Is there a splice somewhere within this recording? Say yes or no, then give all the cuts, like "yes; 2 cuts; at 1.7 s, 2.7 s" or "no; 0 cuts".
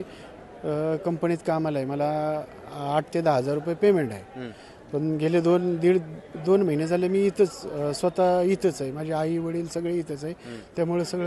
no; 0 cuts